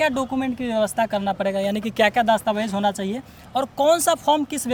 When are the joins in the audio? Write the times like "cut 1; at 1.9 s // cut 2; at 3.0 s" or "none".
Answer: none